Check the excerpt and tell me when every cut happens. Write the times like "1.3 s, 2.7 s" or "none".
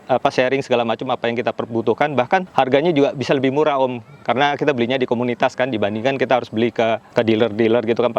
2.5 s, 7.1 s